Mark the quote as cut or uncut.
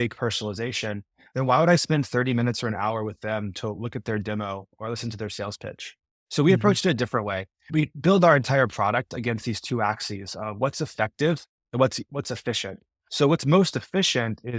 uncut